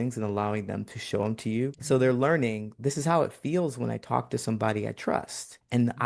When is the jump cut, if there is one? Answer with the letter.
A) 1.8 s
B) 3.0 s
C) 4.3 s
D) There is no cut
A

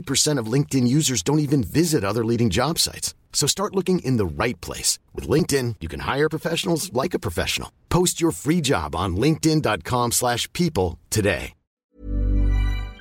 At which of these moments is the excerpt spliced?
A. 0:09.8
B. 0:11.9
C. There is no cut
B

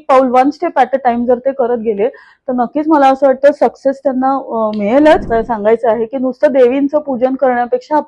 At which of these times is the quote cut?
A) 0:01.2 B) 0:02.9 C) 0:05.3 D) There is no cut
C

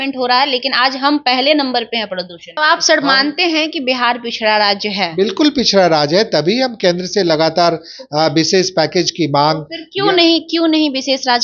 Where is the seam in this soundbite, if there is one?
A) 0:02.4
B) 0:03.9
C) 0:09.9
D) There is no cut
A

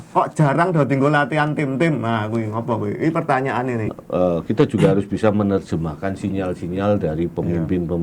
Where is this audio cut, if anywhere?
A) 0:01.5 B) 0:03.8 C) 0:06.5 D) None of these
B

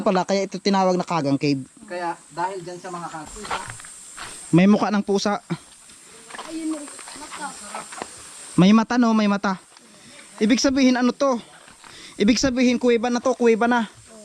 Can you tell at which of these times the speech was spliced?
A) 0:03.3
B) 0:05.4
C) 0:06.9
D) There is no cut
A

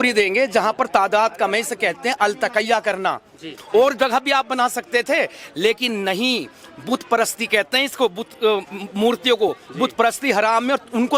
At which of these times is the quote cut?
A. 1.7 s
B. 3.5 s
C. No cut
B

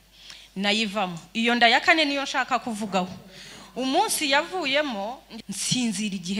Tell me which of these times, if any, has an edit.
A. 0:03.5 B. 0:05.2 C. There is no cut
B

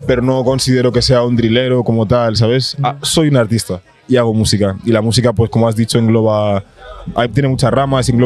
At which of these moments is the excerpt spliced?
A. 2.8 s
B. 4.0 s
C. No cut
C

